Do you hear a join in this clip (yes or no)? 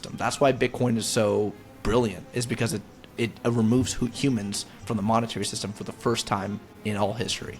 yes